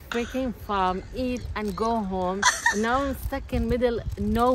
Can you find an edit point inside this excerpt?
no; 0 cuts

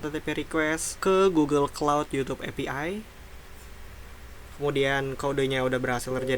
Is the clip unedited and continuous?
no; 1 cut; at 3.2 s

